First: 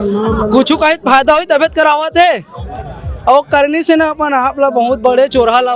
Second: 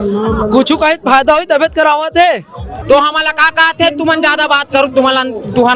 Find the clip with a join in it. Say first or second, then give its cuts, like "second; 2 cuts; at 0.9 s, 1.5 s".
second; 1 cut; at 2.8 s